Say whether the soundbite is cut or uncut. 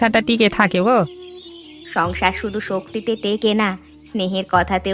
uncut